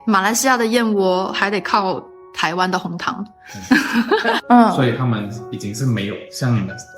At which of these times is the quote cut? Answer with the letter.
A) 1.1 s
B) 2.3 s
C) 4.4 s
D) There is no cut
C